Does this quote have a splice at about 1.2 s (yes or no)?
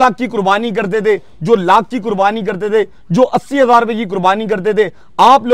no